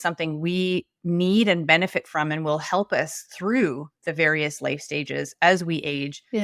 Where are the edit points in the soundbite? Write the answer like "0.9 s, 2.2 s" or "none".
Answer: 0.9 s